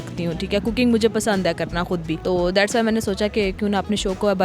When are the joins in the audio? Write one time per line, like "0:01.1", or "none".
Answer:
0:02.1